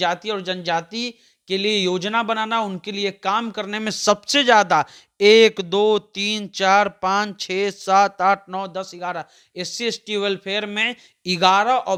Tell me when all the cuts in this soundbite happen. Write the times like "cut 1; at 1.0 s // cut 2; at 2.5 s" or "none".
none